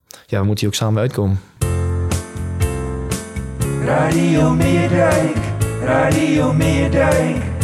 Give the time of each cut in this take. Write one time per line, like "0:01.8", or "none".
0:01.5